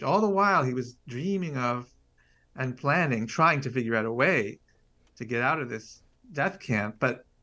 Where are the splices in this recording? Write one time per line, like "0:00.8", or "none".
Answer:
none

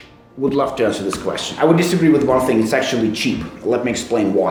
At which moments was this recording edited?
none

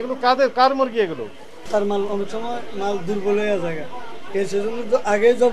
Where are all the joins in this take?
none

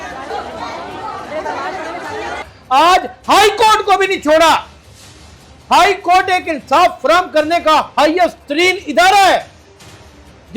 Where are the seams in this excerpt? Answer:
0:02.5

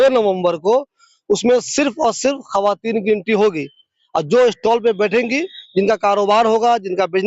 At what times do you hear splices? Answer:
none

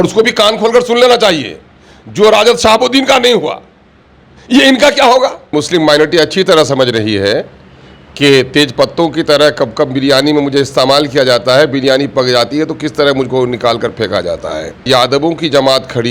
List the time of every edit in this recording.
0:05.5
0:14.8

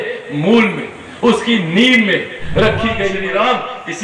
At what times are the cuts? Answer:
0:03.1

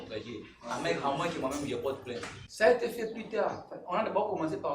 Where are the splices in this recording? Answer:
0:02.4

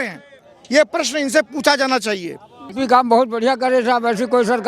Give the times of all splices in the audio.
0:02.6

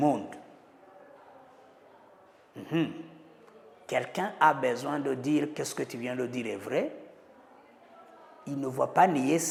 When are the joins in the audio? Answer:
none

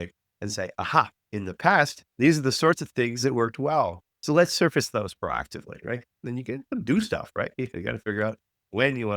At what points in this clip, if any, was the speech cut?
0:01.2
0:04.1
0:06.2

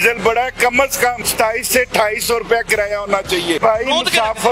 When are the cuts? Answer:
0:01.2
0:03.6

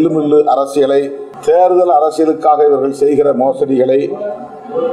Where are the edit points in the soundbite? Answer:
0:01.2

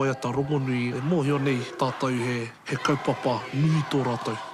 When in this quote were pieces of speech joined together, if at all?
0:00.9
0:01.7
0:02.6

